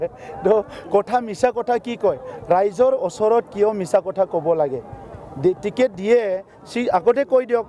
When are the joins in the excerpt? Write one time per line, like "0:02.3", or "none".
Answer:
none